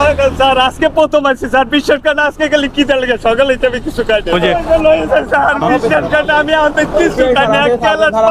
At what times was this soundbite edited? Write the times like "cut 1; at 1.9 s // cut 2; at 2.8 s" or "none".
cut 1; at 4.3 s